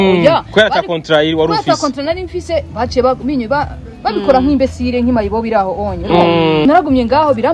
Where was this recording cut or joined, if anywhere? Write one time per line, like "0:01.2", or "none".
0:06.6

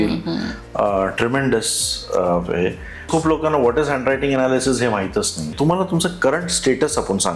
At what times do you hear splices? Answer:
0:03.1
0:05.5

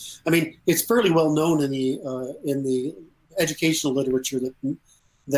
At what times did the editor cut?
none

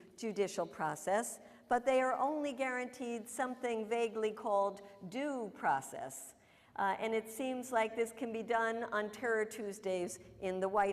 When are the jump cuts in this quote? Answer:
0:05.5

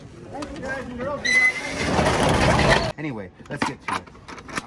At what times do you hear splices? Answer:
0:02.9

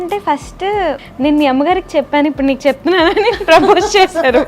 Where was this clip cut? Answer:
0:01.0

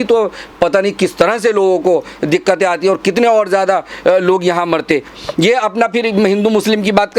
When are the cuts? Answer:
0:05.2

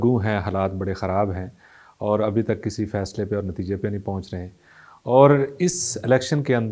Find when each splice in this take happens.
none

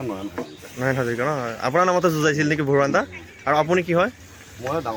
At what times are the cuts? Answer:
none

